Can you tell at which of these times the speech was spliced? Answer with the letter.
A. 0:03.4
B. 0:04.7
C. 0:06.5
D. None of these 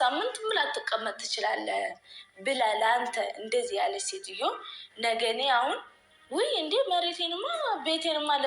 A